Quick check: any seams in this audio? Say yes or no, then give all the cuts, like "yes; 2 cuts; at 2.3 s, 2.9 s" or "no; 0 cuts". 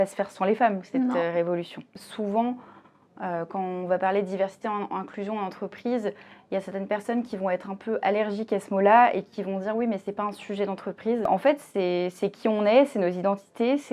yes; 2 cuts; at 2.0 s, 11.2 s